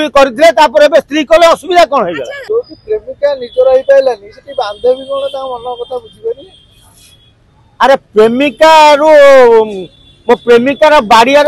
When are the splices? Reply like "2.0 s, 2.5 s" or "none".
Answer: 2.4 s